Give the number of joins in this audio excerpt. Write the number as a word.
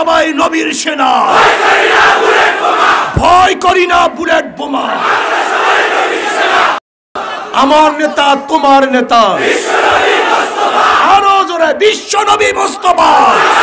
one